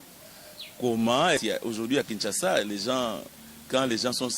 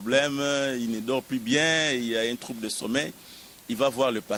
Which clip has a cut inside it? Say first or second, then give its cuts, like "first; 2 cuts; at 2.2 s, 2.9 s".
first; 1 cut; at 1.4 s